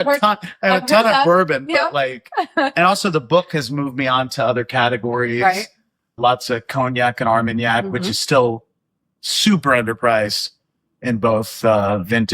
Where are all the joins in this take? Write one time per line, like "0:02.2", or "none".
0:06.2